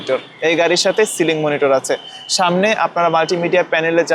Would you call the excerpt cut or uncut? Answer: uncut